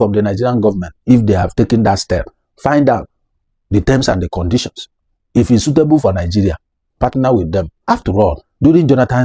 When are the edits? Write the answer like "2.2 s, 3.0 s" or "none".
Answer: 7.9 s